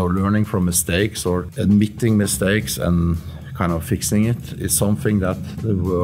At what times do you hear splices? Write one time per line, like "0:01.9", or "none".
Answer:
0:01.5